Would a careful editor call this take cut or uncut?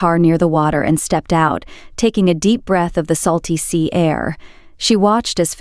uncut